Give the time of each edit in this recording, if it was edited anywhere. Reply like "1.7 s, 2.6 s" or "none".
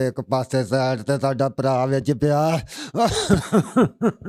none